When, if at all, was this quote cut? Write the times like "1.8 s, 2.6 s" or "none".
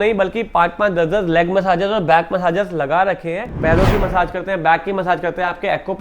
3.5 s